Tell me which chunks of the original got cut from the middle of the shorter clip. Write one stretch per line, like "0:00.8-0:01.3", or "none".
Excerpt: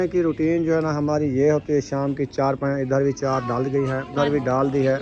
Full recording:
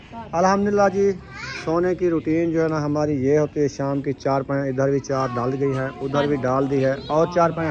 0:05.9-0:06.0